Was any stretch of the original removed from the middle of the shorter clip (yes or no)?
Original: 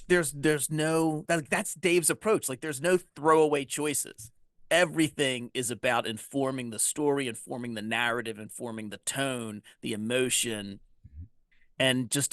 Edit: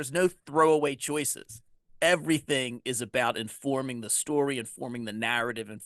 no